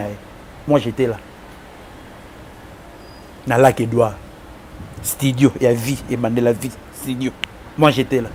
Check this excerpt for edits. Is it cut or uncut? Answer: uncut